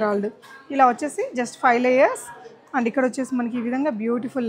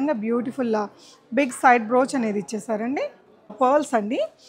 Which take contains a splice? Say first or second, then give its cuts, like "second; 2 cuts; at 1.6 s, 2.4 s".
second; 1 cut; at 3.5 s